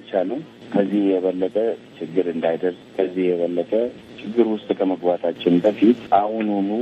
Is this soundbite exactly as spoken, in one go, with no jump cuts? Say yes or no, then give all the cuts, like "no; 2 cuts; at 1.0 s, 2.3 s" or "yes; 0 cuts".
yes; 0 cuts